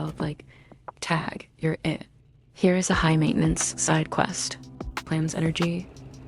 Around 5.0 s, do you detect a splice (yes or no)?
yes